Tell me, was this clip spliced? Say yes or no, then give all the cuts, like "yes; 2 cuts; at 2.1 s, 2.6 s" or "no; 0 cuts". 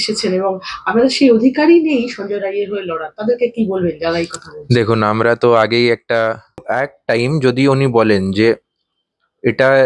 yes; 1 cut; at 6.4 s